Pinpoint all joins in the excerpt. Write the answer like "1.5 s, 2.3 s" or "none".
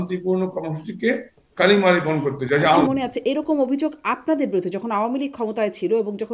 2.8 s